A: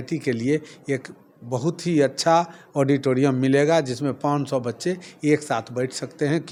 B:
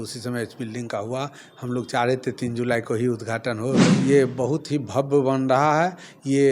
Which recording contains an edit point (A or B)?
B